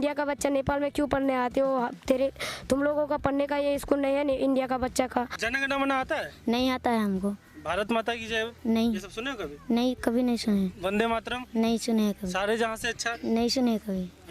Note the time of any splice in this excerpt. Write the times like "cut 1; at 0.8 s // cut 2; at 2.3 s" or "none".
cut 1; at 5.4 s